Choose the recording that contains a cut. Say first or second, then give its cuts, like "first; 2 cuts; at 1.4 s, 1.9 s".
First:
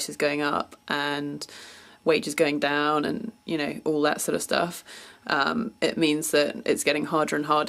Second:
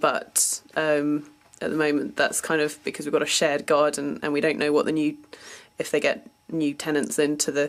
first; 1 cut; at 6.3 s